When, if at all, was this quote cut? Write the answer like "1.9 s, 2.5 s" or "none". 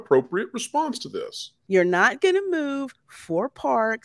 1.6 s

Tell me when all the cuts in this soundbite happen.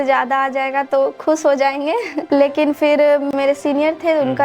2.2 s, 3.3 s

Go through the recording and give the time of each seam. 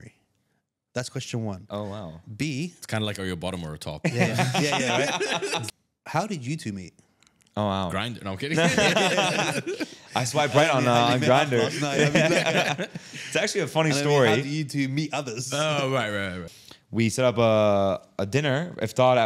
5.7 s, 16.4 s

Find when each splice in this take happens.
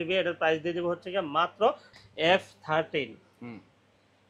1.9 s

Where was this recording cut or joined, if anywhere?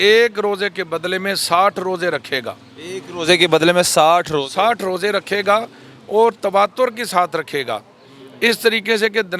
none

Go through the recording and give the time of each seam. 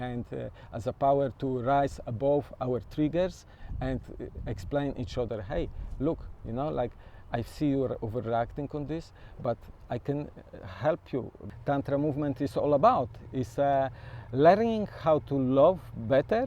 11.4 s

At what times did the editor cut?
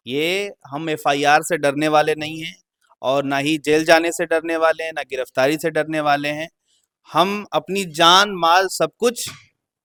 none

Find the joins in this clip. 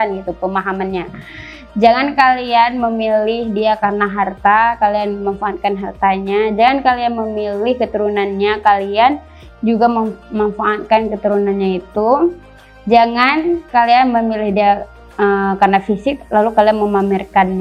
none

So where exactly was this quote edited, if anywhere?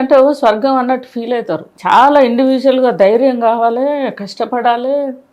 1.7 s

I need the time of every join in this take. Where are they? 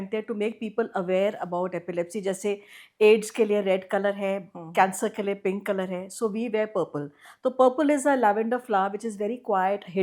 none

